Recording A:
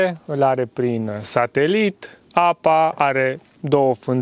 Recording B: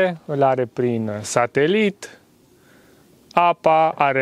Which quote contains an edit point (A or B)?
A